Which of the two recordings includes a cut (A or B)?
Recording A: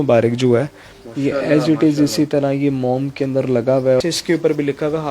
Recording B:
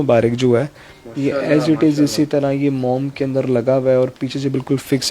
A